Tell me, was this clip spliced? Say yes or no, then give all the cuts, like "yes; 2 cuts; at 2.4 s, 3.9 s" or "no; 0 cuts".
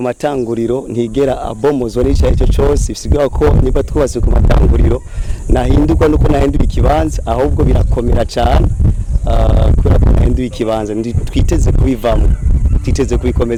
no; 0 cuts